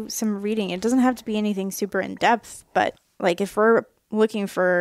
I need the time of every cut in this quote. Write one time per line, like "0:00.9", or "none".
0:03.0